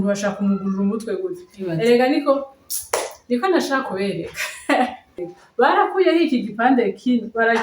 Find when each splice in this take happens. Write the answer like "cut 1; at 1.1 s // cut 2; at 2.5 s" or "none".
cut 1; at 5.2 s